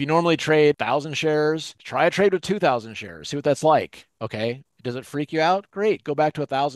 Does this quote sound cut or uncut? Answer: cut